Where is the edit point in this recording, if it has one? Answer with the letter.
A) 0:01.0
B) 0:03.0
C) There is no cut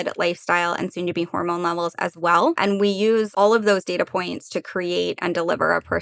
B